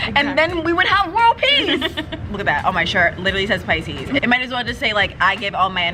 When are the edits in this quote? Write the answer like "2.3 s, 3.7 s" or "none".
2.2 s, 4.2 s